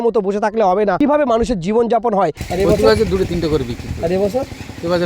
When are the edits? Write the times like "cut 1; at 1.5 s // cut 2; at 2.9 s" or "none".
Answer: cut 1; at 1.0 s // cut 2; at 2.4 s